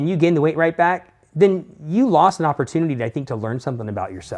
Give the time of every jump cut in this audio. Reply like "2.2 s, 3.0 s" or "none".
none